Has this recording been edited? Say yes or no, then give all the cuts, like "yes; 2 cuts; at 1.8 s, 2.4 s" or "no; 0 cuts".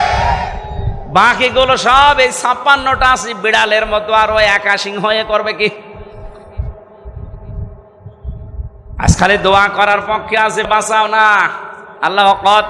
yes; 1 cut; at 10.7 s